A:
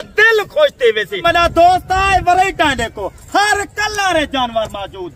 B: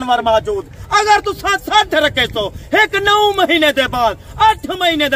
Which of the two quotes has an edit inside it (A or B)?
A